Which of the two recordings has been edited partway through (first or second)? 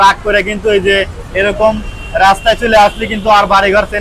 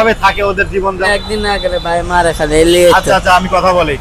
second